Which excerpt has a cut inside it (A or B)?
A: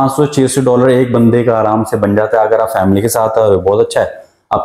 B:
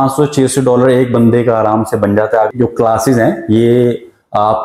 B